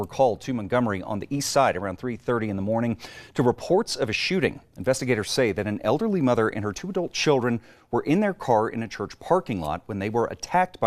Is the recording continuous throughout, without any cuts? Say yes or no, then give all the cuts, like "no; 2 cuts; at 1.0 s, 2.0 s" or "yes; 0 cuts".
yes; 0 cuts